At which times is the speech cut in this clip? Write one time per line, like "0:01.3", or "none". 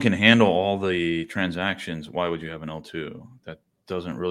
none